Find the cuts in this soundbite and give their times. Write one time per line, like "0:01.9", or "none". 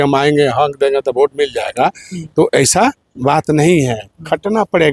none